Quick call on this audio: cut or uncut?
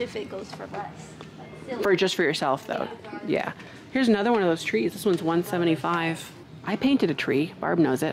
uncut